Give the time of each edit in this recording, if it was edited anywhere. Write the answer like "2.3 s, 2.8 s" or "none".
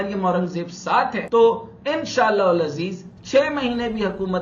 1.2 s